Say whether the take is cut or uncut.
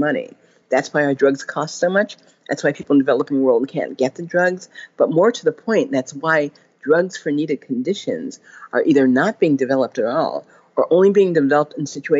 uncut